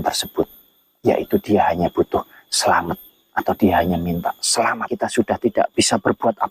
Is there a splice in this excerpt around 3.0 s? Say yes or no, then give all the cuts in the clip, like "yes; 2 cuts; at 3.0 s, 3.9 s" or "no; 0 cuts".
no; 1 cut; at 4.8 s